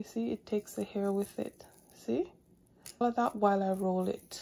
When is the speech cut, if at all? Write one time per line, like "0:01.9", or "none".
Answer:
0:03.0